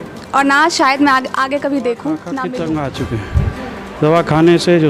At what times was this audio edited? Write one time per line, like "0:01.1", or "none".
0:02.3